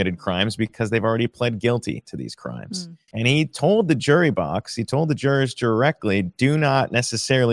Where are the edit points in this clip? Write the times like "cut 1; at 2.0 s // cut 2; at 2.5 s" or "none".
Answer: cut 1; at 3.0 s